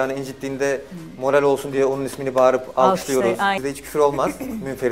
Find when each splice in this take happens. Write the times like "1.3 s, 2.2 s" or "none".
3.6 s